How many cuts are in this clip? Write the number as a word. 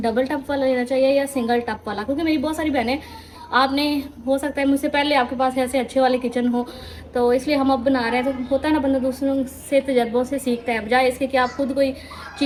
zero